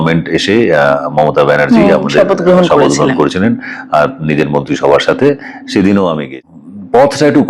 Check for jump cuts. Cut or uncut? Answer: cut